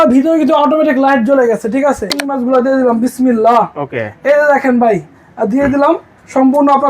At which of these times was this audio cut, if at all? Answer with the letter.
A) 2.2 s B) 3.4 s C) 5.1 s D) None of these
A